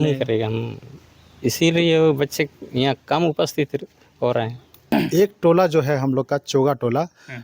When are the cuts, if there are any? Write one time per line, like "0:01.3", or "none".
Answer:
0:04.9